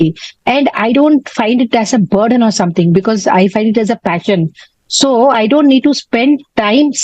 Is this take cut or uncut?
uncut